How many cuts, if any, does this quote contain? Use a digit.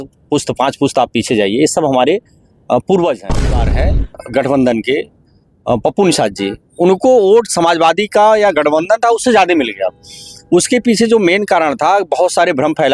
1